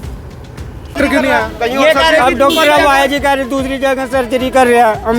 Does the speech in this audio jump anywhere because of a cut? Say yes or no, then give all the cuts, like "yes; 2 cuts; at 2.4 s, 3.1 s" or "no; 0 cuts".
yes; 1 cut; at 0.9 s